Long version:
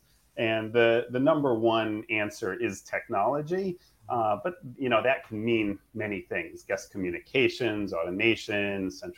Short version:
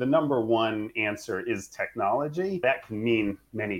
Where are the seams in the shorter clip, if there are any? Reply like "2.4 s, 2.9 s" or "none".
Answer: 2.6 s